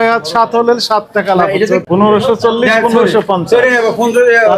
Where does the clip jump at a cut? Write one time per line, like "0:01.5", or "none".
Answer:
0:01.8